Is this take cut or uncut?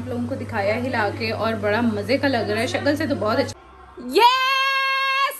cut